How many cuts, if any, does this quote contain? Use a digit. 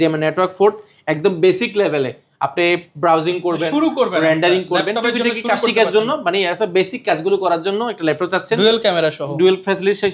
0